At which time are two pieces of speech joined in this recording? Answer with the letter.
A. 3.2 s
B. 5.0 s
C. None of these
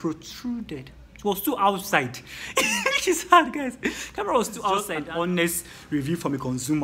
B